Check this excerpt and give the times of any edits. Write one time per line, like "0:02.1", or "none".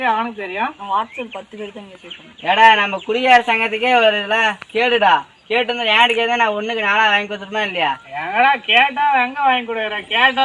none